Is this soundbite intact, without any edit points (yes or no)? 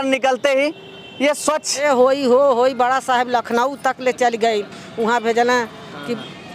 no